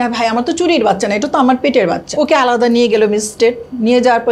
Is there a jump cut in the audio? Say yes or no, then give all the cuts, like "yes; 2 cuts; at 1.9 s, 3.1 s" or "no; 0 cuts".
yes; 1 cut; at 2.0 s